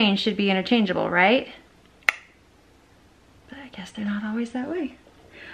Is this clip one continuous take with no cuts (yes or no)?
yes